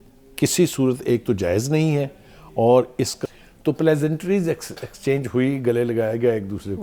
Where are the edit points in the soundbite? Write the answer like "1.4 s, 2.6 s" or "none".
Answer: 3.1 s